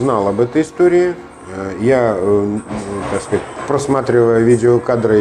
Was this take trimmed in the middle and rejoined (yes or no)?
no